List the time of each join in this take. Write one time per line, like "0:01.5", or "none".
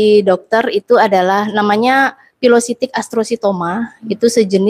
none

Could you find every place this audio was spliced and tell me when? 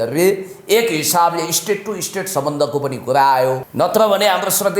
0:03.6

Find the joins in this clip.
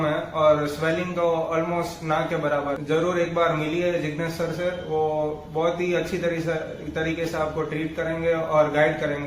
0:02.8

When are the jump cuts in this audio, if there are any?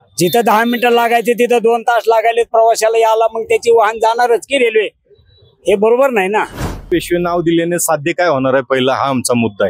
0:06.9

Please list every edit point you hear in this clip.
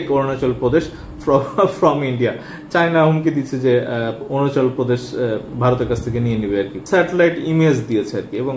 0:06.8

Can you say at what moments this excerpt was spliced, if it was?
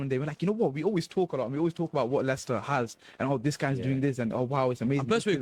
none

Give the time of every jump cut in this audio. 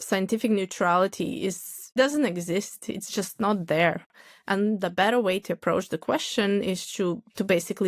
0:01.7

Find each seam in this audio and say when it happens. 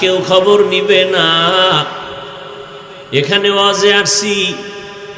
none

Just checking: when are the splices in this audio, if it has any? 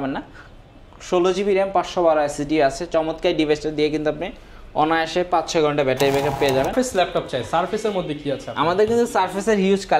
0:06.7

